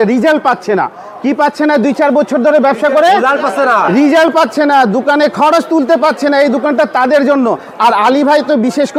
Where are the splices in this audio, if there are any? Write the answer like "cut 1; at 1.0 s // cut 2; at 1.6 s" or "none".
none